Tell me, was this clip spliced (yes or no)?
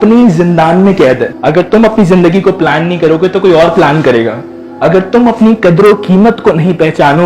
yes